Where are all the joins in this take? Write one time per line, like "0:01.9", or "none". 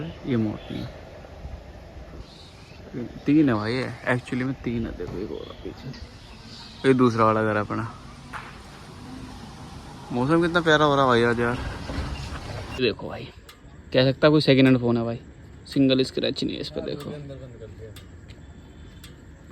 0:12.8